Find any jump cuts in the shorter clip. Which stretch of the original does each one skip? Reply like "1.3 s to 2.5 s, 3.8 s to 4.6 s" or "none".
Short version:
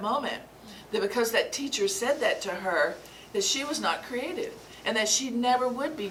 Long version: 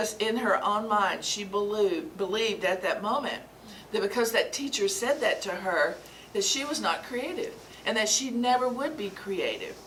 none